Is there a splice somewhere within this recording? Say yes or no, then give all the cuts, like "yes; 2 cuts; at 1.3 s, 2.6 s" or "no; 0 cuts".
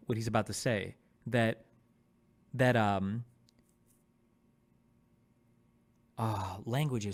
no; 0 cuts